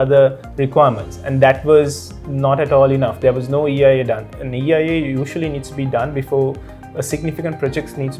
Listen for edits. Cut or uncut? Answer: uncut